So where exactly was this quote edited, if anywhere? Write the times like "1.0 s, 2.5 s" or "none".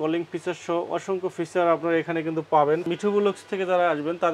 2.9 s

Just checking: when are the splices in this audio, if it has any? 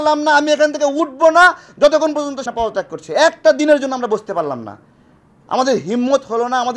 2.4 s

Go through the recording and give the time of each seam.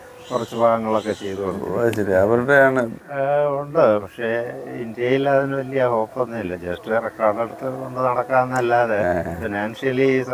3.0 s

